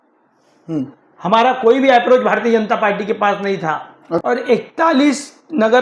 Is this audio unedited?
no; 1 cut; at 4.2 s

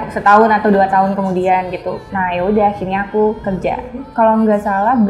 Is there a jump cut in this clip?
yes; 2 cuts; at 2.0 s, 4.1 s

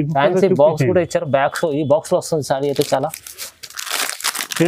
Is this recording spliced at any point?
no; 0 cuts

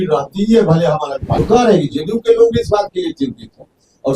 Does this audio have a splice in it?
yes; 1 cut; at 1.4 s

